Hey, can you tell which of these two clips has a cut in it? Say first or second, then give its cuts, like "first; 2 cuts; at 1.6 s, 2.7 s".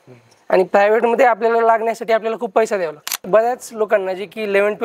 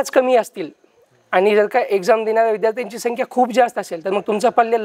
first; 1 cut; at 3.3 s